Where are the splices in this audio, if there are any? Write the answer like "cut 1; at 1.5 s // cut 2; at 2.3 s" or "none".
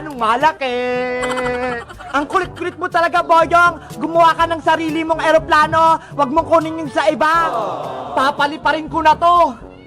none